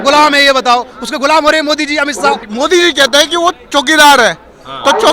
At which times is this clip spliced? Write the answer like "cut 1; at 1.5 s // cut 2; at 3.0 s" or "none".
cut 1; at 2.4 s